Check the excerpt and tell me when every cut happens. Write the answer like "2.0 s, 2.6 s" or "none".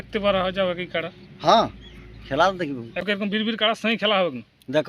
3.1 s